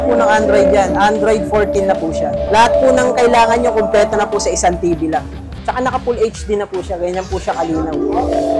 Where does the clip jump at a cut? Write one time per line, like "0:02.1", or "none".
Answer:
0:02.5
0:05.6